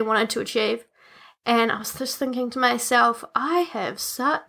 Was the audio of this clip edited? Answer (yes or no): no